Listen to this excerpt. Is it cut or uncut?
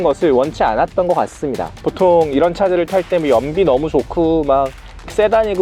cut